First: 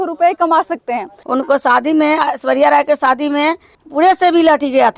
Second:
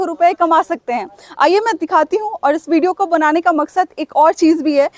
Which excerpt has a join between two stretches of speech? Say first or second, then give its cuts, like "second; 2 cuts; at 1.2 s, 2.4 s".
first; 2 cuts; at 1.2 s, 3.8 s